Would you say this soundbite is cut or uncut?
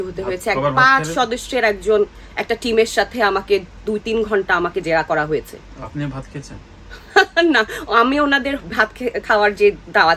uncut